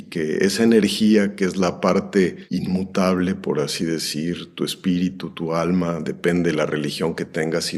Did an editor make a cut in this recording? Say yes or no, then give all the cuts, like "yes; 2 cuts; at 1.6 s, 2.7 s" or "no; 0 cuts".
no; 0 cuts